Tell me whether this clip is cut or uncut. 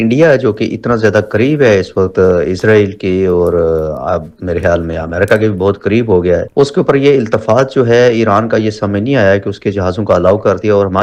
uncut